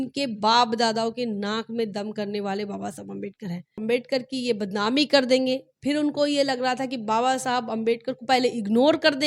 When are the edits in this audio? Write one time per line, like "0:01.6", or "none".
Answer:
0:03.8